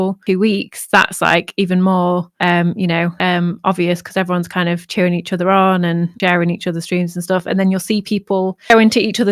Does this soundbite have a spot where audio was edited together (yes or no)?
no